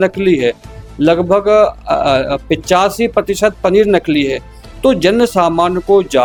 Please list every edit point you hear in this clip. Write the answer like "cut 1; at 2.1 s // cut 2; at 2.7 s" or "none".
none